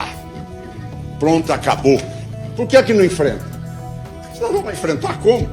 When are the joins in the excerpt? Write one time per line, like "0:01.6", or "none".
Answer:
0:02.2